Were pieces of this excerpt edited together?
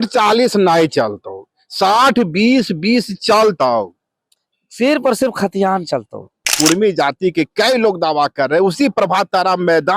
yes; 1 cut; at 6.5 s

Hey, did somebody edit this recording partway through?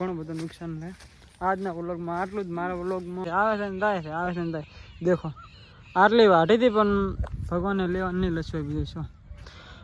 yes; 1 cut; at 3.2 s

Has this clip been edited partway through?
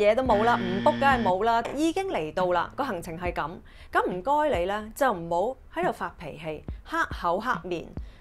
yes; 1 cut; at 1.7 s

